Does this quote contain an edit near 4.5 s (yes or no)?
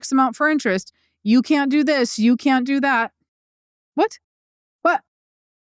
no